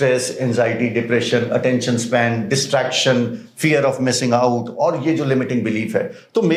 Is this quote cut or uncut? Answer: uncut